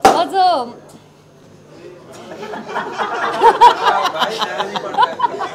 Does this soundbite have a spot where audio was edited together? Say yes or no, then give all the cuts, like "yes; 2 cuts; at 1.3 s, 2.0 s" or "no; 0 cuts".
no; 0 cuts